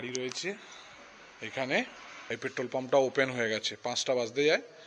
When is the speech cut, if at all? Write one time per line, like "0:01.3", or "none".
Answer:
0:02.0